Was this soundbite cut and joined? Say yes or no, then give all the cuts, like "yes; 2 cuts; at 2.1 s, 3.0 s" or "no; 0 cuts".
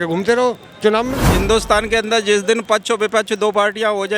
yes; 1 cut; at 1.3 s